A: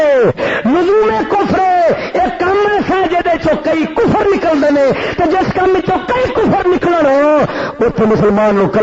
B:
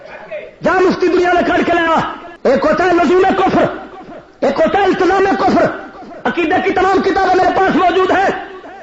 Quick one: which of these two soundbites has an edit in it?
B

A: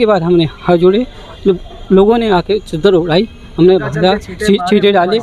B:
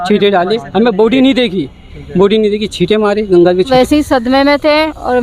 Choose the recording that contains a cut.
B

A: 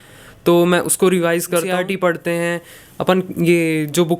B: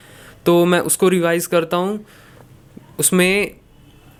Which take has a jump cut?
A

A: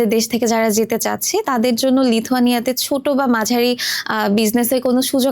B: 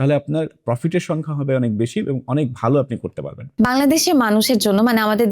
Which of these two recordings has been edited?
B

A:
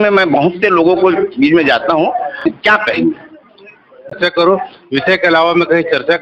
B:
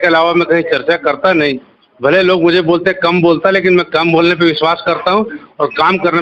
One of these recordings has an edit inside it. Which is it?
A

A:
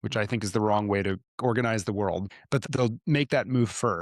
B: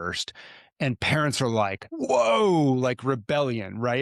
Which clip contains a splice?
A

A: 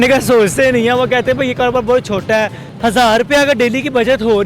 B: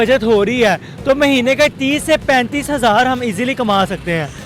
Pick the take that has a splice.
A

